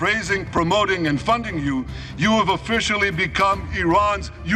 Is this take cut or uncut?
uncut